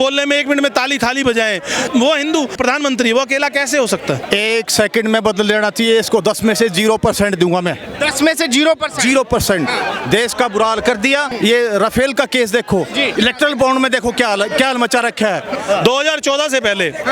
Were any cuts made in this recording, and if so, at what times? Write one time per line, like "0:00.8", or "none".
0:01.9
0:02.6
0:04.2
0:11.3
0:13.1
0:15.6